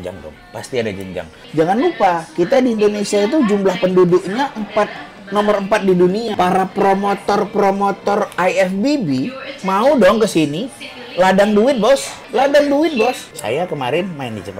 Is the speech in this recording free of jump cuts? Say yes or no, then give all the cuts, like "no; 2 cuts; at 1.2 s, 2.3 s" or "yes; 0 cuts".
no; 4 cuts; at 1.4 s, 6.3 s, 12.2 s, 13.3 s